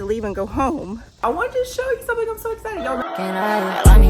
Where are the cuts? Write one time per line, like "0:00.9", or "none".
0:01.2
0:03.0